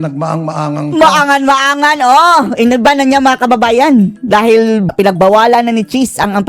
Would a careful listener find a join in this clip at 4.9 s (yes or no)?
yes